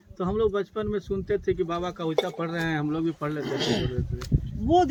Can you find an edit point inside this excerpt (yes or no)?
no